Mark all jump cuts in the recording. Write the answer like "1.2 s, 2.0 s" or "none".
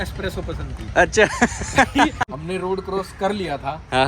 2.2 s

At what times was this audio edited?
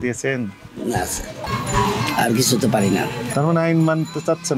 1.4 s

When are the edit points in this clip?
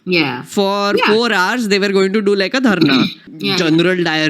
3.2 s

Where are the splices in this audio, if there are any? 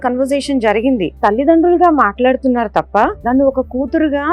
1.1 s, 3.2 s

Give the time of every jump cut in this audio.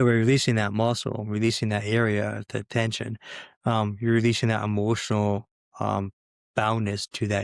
none

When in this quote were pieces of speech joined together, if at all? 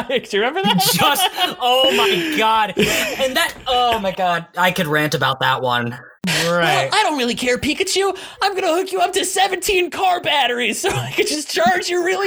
5.8 s

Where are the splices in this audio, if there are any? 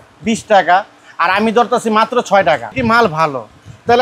2.7 s

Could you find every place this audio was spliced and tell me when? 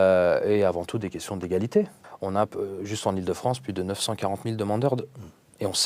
2.0 s

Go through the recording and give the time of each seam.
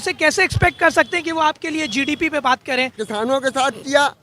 3.0 s

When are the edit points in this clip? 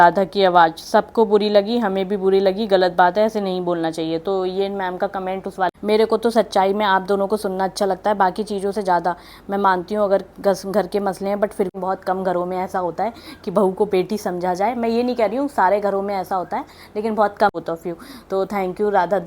5.8 s, 11.7 s, 17.5 s

